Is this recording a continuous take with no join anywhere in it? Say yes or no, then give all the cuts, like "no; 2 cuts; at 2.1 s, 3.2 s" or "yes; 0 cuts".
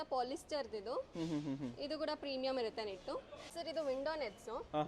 no; 1 cut; at 3.5 s